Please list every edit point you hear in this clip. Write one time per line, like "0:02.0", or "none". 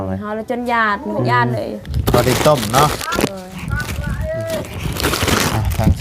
0:01.9